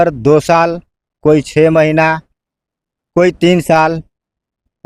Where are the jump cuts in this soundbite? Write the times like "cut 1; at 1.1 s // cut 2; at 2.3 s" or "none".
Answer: none